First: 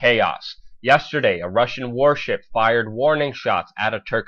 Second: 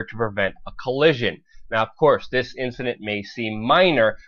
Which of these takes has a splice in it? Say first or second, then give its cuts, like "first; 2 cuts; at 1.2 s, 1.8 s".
first; 1 cut; at 2.2 s